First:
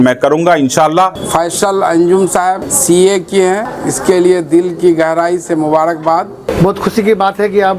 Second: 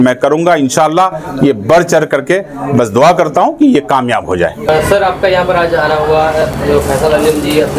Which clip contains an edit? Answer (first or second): first